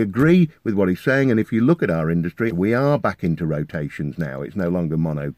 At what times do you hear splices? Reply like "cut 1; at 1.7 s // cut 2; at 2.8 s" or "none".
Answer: cut 1; at 2.5 s